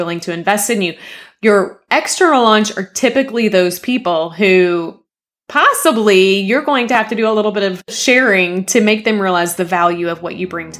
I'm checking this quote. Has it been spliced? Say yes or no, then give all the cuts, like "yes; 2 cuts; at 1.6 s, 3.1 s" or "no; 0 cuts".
no; 0 cuts